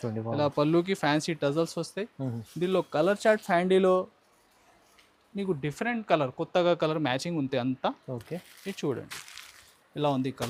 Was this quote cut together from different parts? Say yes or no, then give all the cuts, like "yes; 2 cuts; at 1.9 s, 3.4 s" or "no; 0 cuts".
no; 0 cuts